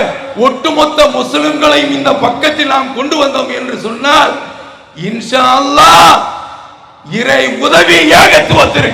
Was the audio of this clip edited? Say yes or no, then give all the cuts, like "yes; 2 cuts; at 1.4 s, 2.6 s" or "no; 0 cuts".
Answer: no; 0 cuts